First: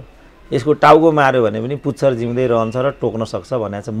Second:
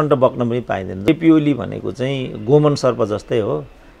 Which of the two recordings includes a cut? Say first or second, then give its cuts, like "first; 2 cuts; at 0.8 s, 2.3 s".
second; 1 cut; at 1.1 s